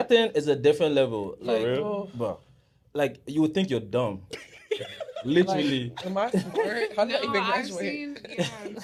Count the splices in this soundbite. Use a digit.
0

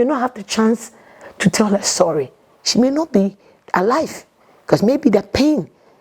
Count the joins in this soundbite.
0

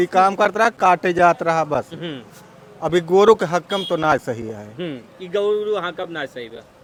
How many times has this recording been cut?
0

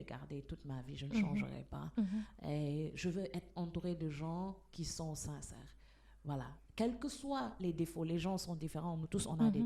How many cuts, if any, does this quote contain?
0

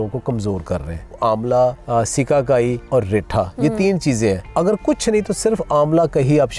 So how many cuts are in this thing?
4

